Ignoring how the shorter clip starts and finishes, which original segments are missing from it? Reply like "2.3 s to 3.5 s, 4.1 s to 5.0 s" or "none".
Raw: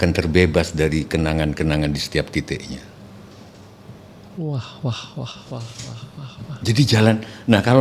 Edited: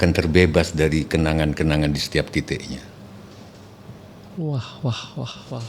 none

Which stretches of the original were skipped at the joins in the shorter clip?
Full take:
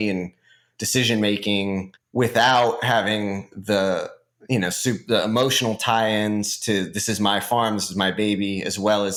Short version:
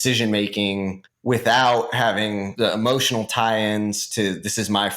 3.4 s to 5.0 s

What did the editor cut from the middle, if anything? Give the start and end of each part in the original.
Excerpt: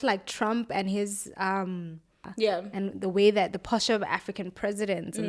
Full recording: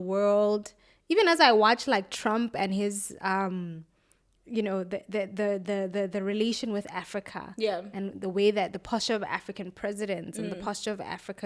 4.0 s to 7.4 s

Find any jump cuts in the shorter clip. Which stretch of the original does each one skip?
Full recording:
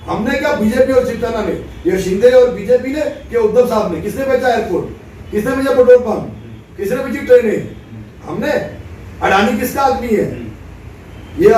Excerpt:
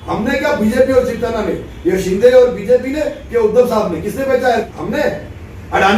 4.7 s to 8.2 s

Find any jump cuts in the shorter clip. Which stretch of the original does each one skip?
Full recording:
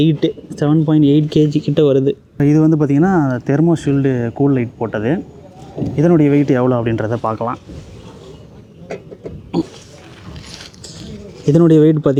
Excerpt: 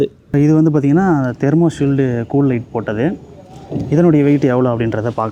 none

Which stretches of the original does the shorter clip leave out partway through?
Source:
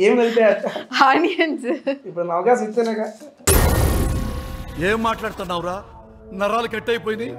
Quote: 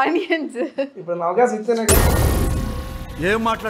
3.0 s to 3.5 s

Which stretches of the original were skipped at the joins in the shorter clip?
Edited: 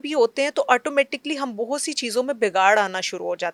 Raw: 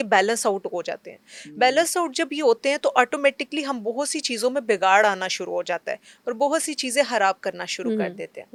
none

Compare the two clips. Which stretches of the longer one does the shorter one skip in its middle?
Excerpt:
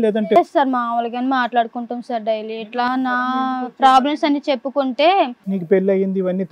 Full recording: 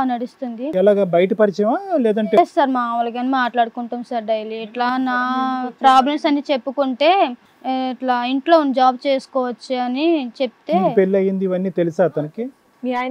7.6 s to 10.9 s

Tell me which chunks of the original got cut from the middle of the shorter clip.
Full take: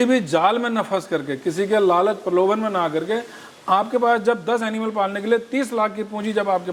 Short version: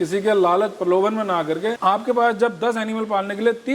3.2 s to 3.6 s

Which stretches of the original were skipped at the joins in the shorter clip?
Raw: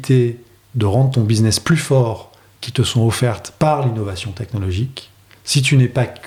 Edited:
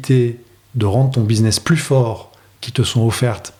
none

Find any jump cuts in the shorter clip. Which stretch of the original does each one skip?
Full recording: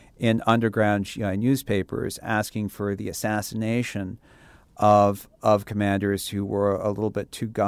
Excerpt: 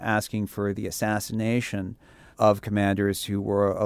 4.5 s to 5.3 s

